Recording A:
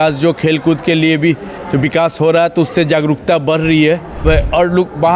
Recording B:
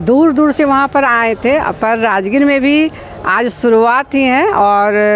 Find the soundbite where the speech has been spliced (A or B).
A